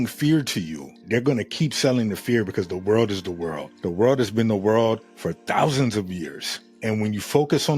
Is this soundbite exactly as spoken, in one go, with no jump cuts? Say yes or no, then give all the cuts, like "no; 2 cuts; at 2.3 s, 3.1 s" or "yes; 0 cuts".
no; 2 cuts; at 1.0 s, 6.7 s